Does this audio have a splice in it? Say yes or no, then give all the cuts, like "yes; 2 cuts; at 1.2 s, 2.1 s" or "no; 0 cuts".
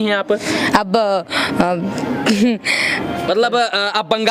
yes; 1 cut; at 3.3 s